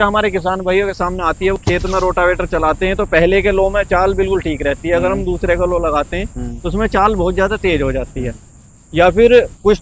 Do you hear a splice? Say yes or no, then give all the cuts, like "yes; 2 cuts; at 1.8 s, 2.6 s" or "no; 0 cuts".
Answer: yes; 1 cut; at 1.6 s